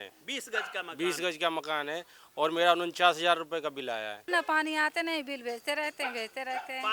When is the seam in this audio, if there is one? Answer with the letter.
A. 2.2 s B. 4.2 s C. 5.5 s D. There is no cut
B